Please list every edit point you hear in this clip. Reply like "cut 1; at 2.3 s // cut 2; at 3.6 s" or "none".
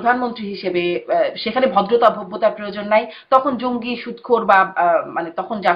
none